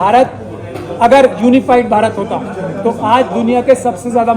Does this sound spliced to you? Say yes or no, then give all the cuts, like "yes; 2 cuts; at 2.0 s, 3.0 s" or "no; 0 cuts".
no; 0 cuts